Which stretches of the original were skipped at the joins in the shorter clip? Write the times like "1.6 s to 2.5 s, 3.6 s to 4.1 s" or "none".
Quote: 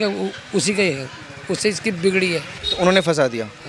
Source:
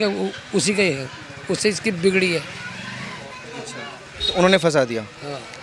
2.6 s to 4.2 s